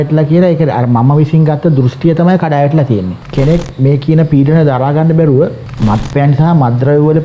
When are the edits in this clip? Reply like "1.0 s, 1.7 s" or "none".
3.2 s, 5.7 s